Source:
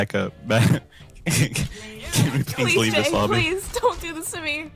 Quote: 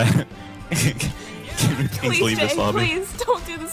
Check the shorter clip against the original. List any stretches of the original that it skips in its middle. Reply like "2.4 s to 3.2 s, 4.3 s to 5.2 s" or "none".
none